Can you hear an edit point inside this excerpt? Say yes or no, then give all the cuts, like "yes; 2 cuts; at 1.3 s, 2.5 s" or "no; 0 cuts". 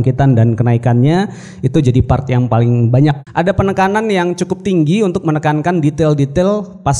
yes; 1 cut; at 3.2 s